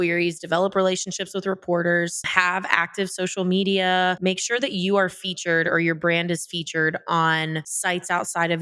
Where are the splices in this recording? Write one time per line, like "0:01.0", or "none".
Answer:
0:04.2

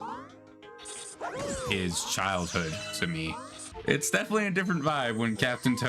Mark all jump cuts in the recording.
0:03.7

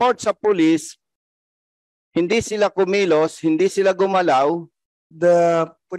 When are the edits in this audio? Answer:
0:05.1

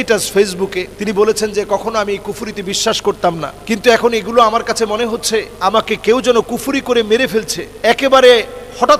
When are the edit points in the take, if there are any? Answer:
0:00.9
0:03.5
0:05.5
0:07.6

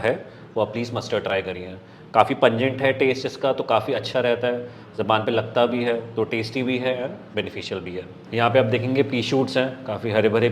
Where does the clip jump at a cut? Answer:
none

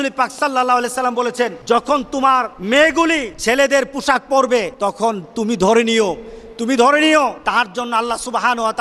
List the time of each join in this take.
0:01.6
0:02.6
0:03.3
0:04.7
0:07.4

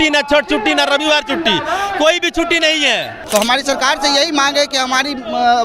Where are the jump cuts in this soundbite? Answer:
0:03.1

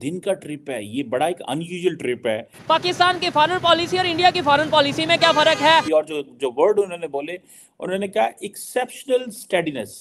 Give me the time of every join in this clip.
0:02.6
0:05.8

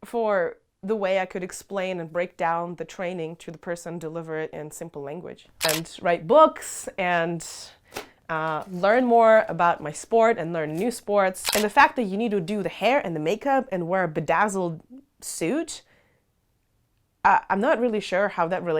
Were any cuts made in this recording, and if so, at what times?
0:05.7
0:11.4

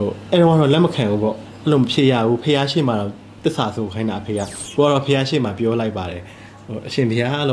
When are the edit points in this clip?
0:04.6

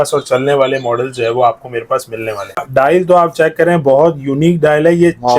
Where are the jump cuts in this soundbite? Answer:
0:02.7

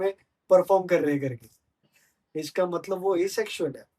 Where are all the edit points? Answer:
0:01.9

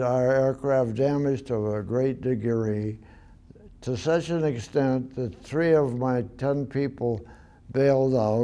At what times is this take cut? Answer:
none

